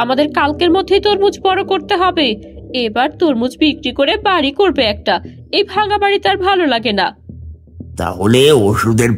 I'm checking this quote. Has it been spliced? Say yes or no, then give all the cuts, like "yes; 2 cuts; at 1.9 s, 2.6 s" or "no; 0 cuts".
no; 0 cuts